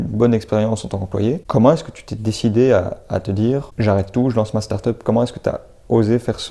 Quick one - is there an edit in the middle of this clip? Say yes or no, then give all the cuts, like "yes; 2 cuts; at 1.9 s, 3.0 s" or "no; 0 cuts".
yes; 2 cuts; at 1.4 s, 3.7 s